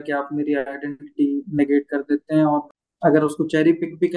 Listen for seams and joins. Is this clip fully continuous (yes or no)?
no